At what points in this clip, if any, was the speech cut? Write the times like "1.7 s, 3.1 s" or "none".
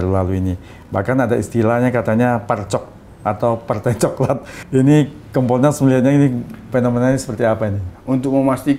4.5 s, 7.9 s